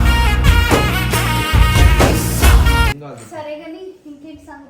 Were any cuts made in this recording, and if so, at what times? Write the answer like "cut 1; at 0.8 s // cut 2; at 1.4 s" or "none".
cut 1; at 3.0 s